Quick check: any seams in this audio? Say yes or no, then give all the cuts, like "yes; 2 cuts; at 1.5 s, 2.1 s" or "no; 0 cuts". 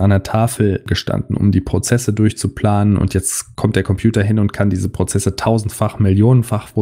no; 0 cuts